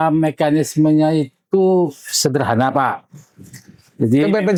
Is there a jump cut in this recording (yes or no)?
no